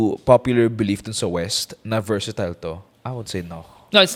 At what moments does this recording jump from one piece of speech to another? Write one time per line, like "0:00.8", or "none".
none

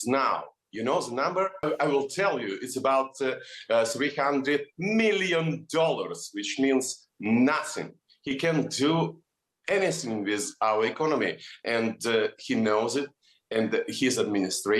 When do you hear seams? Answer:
0:01.6

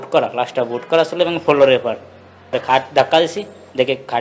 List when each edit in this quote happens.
0:02.5

